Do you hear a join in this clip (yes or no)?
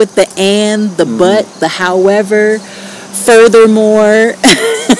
no